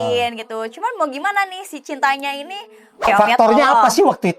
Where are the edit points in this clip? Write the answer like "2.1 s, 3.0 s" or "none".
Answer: 3.1 s